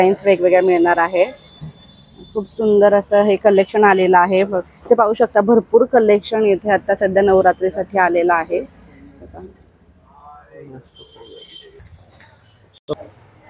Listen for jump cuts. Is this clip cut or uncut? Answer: uncut